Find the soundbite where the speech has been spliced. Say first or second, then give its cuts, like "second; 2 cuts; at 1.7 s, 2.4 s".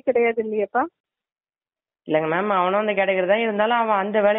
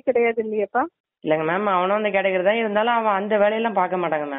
second; 1 cut; at 1.0 s